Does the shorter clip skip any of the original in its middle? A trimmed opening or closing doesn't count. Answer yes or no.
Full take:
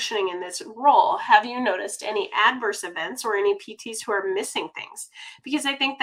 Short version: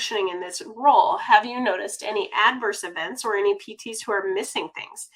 no